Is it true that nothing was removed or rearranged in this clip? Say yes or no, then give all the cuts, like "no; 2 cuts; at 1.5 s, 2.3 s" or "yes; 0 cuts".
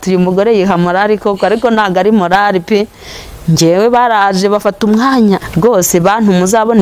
no; 1 cut; at 5.4 s